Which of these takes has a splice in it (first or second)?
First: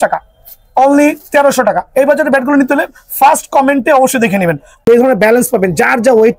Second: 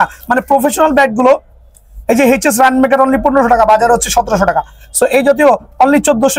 first